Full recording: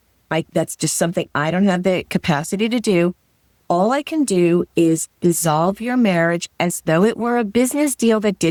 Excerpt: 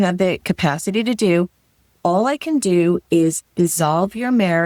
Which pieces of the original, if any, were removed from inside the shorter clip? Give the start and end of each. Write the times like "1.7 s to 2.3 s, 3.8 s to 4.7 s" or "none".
none